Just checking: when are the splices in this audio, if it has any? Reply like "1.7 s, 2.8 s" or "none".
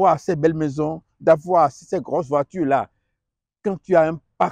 none